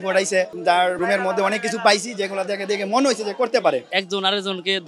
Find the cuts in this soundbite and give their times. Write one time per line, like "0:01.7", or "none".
0:00.9
0:03.9